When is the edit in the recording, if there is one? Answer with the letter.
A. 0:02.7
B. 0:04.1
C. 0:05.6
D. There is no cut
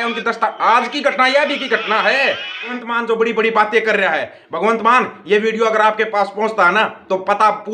A